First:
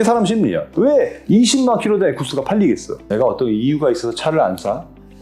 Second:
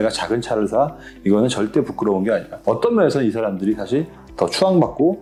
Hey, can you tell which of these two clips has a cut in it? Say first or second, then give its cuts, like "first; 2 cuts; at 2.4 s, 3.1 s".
first; 1 cut; at 2.9 s